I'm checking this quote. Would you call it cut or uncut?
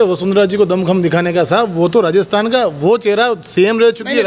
uncut